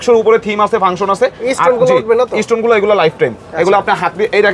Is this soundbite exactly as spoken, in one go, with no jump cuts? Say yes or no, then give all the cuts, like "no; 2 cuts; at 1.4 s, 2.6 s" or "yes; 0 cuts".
yes; 0 cuts